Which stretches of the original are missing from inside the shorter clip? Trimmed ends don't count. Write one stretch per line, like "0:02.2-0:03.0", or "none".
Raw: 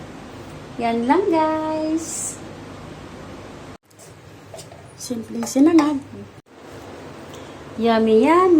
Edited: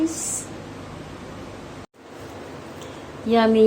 0:03.9-0:06.5